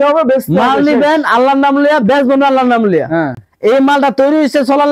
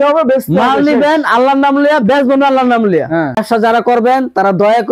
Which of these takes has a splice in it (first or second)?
second